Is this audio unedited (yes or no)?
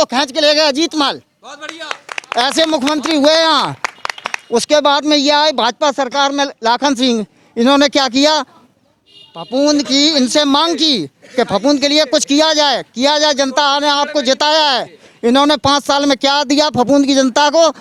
yes